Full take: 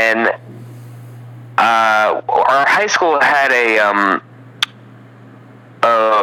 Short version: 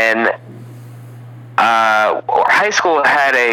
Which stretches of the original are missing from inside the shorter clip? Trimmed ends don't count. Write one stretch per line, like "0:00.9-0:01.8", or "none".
0:02.5-0:02.6